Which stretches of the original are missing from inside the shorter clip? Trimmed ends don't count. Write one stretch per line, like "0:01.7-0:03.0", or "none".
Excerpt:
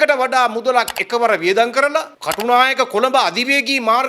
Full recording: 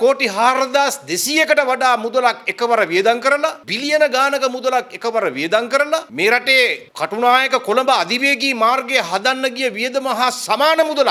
0:03.7-0:06.9